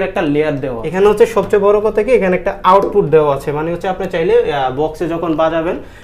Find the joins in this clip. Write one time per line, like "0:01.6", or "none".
0:00.9